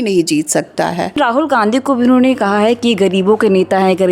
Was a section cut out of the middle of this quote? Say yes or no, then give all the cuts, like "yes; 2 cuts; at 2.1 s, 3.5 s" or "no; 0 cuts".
yes; 1 cut; at 1.2 s